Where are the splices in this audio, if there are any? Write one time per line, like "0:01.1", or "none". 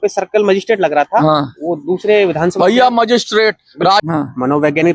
0:04.0